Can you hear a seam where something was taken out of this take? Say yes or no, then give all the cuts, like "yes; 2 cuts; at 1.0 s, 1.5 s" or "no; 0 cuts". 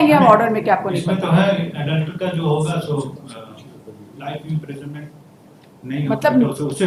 no; 0 cuts